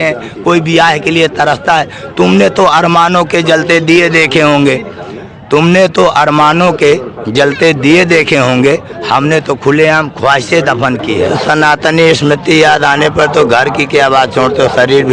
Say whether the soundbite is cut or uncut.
cut